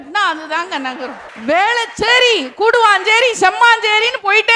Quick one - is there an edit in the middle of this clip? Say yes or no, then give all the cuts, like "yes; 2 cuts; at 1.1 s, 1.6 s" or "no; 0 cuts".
yes; 1 cut; at 1.3 s